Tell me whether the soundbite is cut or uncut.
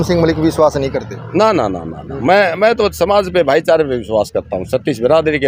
uncut